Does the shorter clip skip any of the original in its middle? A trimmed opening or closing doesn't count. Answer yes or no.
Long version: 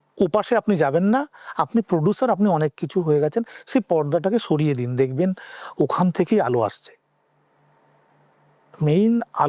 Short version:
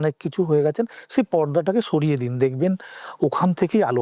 no